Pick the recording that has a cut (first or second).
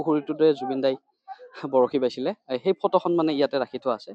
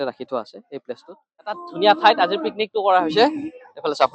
second